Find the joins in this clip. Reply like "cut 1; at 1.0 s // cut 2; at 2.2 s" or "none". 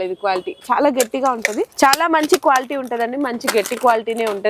cut 1; at 1.7 s